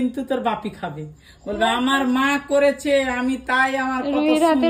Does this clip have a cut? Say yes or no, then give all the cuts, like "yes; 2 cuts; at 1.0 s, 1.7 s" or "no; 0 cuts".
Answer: no; 0 cuts